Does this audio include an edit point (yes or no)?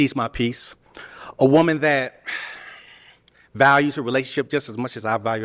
no